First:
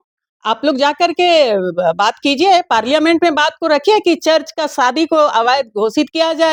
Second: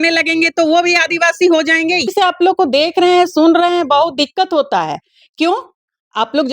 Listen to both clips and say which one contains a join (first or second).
second